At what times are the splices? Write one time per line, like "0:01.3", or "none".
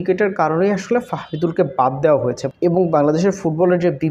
0:02.5